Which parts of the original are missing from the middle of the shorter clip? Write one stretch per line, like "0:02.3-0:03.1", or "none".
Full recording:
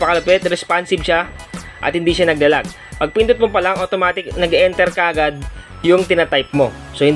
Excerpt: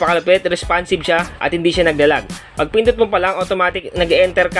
0:01.3-0:01.8